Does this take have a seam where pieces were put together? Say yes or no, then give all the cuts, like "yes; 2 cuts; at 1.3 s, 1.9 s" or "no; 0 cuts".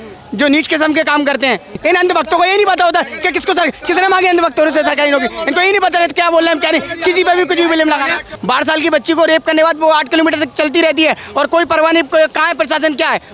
yes; 2 cuts; at 1.8 s, 8.3 s